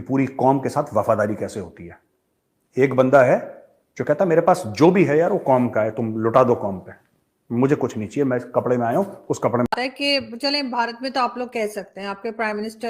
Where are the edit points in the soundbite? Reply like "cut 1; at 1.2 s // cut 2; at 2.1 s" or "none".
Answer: cut 1; at 9.8 s